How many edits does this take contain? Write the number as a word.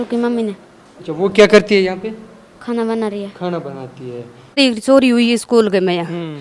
one